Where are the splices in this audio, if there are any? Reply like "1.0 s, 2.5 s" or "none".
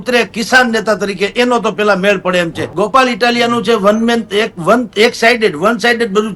2.6 s